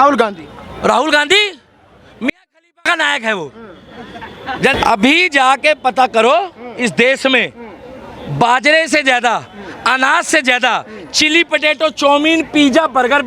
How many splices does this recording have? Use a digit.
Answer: 1